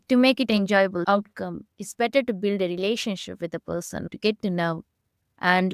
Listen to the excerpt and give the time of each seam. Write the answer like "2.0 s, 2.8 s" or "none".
1.0 s